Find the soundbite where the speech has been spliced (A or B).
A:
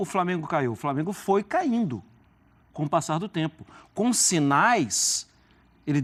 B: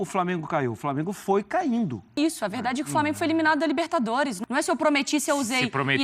B